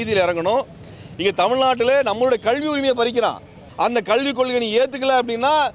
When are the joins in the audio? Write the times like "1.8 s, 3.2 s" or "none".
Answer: 3.6 s